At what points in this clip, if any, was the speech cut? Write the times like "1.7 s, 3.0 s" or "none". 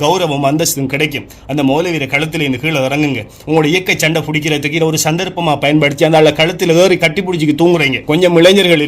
8.0 s